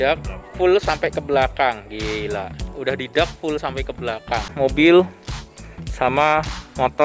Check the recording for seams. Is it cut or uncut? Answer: cut